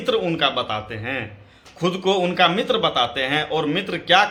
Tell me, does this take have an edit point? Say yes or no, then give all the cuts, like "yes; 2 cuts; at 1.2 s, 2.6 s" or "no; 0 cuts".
no; 0 cuts